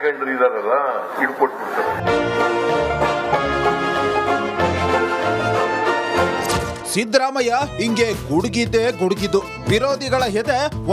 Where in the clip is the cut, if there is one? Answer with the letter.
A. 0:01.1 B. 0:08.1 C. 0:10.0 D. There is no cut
A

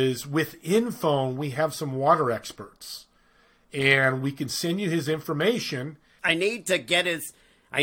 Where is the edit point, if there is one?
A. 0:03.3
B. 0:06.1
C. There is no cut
B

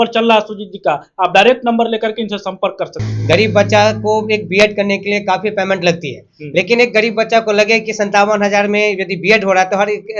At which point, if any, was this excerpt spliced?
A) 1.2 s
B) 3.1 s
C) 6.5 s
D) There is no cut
B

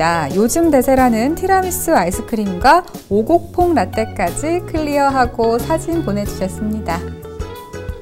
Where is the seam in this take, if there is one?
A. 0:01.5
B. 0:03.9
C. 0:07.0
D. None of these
C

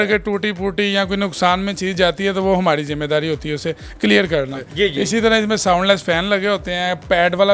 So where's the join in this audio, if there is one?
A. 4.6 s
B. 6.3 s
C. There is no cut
A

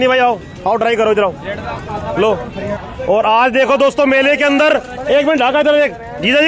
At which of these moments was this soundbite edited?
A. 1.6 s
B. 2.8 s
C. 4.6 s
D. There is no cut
B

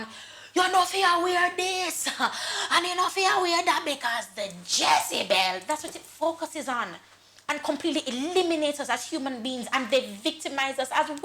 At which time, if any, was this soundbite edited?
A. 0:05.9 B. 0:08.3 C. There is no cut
C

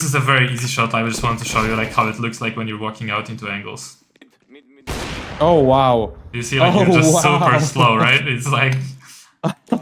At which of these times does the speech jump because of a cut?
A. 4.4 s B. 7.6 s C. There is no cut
C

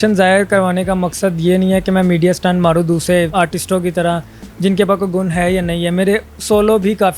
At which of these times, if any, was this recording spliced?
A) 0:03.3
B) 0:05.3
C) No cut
A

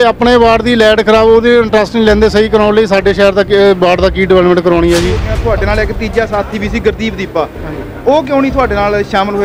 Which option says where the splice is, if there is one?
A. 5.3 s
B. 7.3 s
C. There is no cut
A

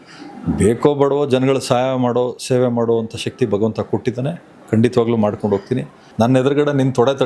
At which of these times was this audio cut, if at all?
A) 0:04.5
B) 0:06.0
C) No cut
B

